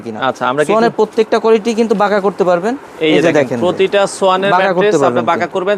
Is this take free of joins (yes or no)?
yes